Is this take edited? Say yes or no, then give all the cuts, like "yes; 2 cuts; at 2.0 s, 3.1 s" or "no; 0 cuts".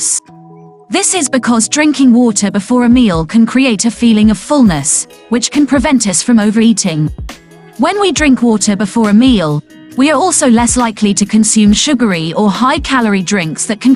no; 0 cuts